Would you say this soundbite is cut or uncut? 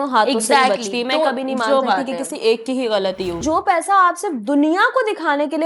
cut